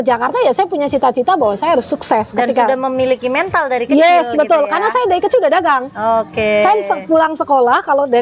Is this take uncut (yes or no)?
yes